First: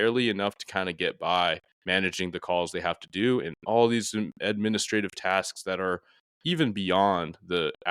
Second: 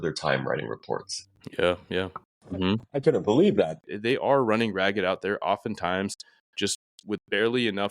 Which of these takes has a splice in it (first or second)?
second